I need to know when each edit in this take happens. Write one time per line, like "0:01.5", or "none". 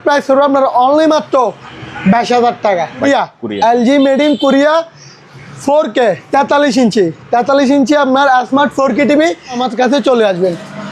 0:03.1
0:09.6